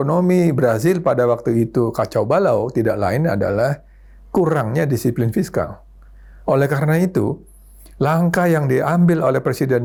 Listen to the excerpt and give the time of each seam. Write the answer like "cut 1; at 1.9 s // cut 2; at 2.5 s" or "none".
none

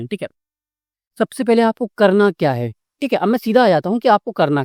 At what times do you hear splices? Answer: none

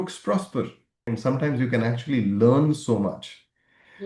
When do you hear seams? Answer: cut 1; at 1.1 s

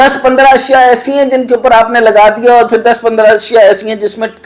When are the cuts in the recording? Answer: none

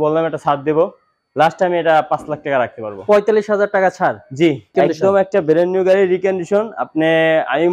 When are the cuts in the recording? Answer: cut 1; at 4.7 s

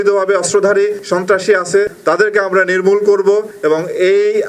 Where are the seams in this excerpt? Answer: cut 1; at 1.0 s // cut 2; at 1.9 s // cut 3; at 3.5 s

